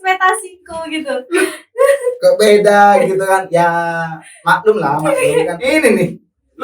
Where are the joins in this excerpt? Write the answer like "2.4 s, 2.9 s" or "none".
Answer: 5.0 s